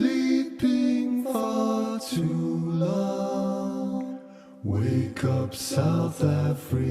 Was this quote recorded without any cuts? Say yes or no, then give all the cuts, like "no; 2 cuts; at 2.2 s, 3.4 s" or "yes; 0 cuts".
no; 1 cut; at 5.9 s